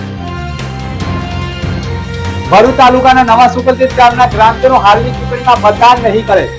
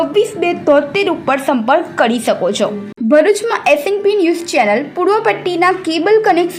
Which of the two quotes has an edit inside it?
first; 1 cut; at 1.0 s

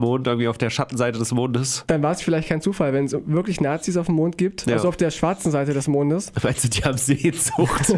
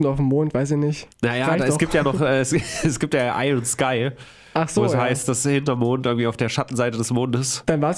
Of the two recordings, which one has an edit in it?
second; 1 cut; at 1.0 s

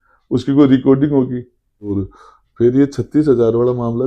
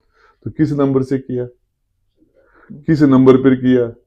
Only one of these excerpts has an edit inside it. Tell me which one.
first; 1 cut; at 2.0 s

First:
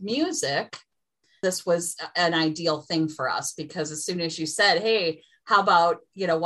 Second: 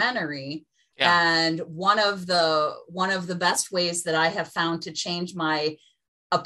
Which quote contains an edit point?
first; 1 cut; at 1.4 s

